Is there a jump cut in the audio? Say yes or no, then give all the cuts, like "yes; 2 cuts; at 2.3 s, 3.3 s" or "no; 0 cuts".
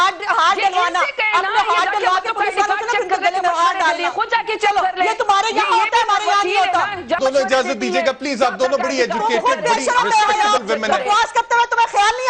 yes; 1 cut; at 7.2 s